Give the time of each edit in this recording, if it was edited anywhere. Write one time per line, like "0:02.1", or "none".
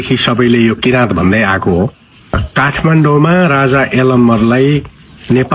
0:02.4